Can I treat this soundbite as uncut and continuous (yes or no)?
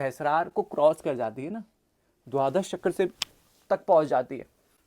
yes